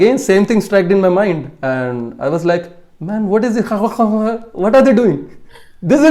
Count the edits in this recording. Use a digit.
0